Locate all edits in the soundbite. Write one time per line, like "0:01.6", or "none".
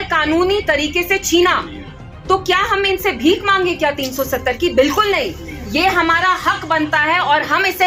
none